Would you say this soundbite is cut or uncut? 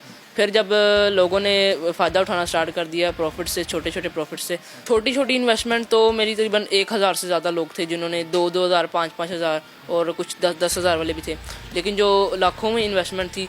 cut